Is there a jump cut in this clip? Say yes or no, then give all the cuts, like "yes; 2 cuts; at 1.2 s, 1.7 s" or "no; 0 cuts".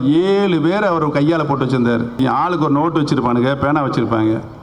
yes; 1 cut; at 2.2 s